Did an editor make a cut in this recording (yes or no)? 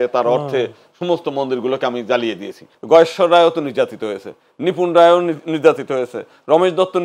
yes